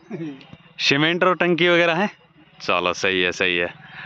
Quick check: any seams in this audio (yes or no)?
no